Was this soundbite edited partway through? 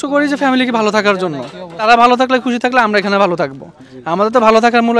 yes; 1 cut; at 1.8 s

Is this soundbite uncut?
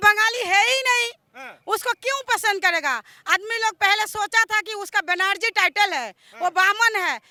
yes; 0 cuts

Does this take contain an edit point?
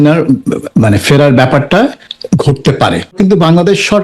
yes; 2 cuts; at 2.1 s, 3.2 s

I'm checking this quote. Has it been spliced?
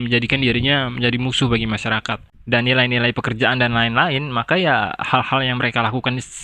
yes; 1 cut; at 2.4 s

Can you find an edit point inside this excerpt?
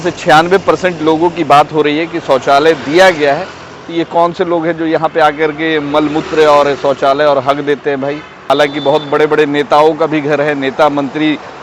yes; 1 cut; at 8.4 s

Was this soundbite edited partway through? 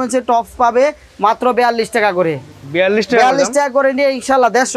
no; 0 cuts

